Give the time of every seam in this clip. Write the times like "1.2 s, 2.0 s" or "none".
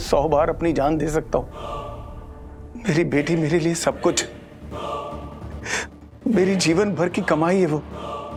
none